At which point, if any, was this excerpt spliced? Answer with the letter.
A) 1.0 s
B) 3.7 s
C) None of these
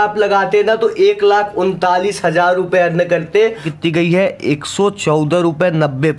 B